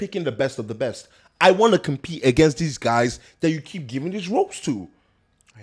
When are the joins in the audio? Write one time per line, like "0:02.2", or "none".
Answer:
none

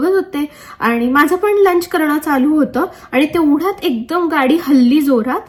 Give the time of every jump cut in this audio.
none

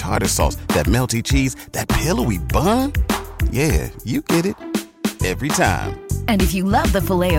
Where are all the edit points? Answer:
none

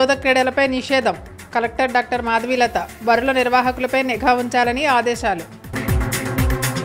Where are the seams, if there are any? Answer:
none

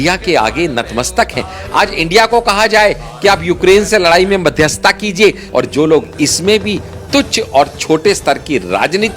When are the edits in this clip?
0:05.4

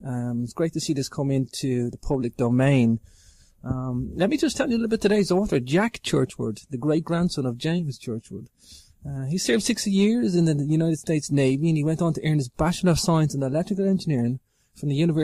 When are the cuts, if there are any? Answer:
0:14.0

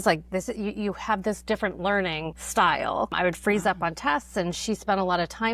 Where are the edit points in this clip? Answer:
0:02.3
0:03.1

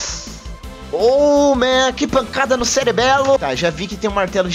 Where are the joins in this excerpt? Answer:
none

